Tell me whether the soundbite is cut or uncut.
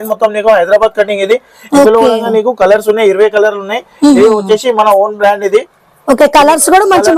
uncut